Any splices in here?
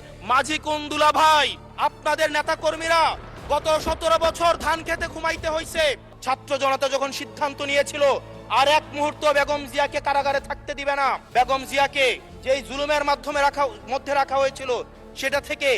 yes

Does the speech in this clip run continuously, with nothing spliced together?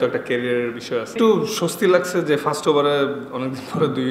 no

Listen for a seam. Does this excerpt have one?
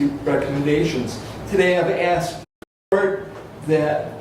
yes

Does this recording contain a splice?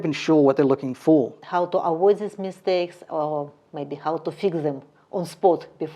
yes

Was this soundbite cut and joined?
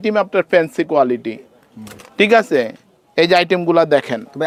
no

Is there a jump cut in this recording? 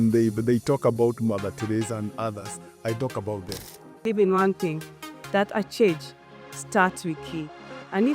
yes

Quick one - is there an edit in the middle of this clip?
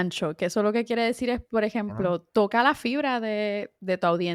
no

